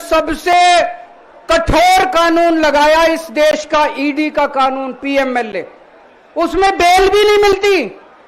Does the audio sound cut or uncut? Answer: uncut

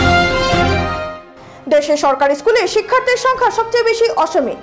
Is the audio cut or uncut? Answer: uncut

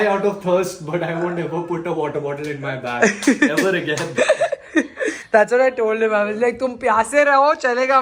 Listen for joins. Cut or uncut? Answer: uncut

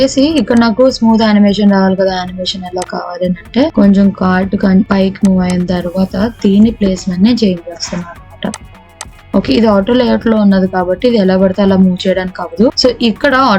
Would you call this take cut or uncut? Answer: uncut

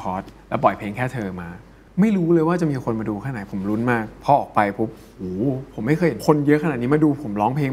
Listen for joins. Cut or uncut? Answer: cut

